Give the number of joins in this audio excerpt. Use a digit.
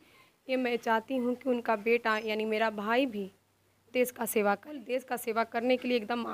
1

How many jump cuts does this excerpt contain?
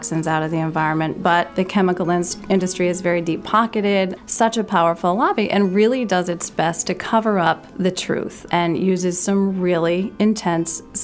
3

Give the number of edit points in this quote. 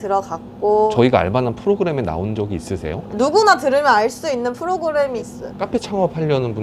2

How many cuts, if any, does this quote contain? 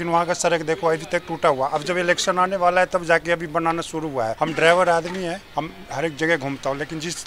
2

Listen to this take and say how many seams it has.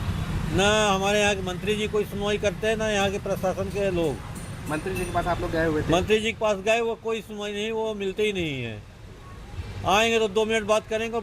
0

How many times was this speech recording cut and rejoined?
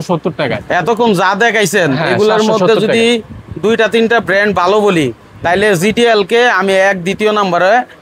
0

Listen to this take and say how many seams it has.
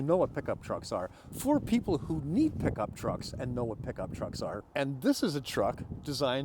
1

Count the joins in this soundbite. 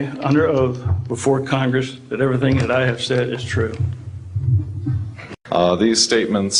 1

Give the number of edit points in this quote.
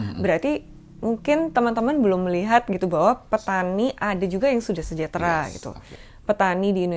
1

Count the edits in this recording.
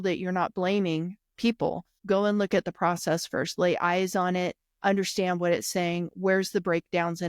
1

